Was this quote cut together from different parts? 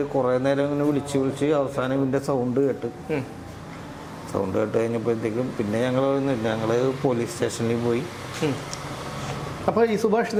no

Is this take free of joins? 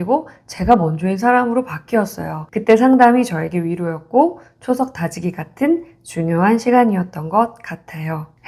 yes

